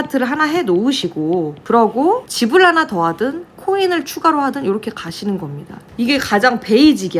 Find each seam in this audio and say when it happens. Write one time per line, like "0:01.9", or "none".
0:01.6
0:02.3
0:05.8